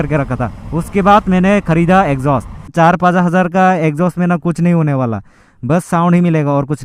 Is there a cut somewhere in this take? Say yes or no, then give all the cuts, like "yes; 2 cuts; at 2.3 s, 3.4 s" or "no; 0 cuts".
yes; 1 cut; at 2.6 s